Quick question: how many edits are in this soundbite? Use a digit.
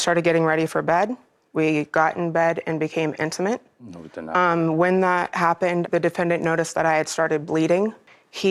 0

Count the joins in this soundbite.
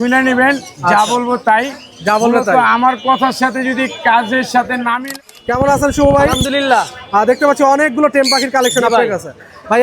1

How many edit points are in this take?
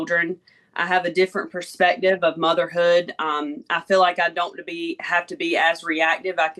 0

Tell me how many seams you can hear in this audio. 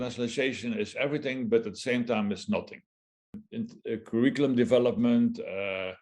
1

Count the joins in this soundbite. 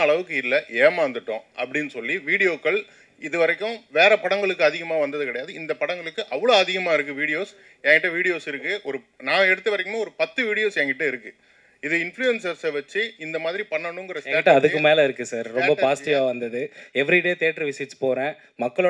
0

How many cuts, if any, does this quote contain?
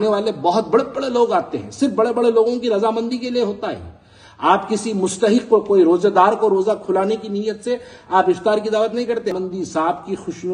1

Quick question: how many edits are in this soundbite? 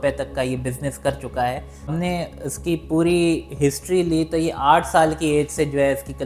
1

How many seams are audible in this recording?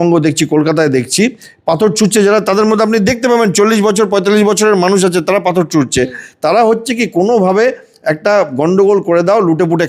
1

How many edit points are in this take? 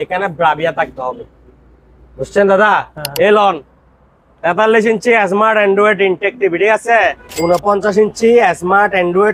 2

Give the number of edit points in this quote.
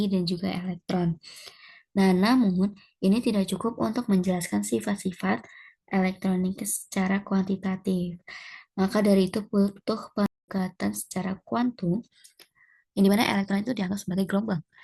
1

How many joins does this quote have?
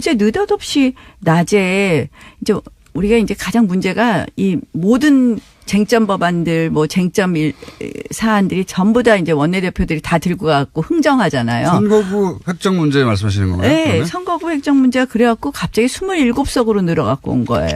1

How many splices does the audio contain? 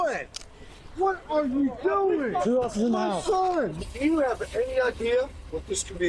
2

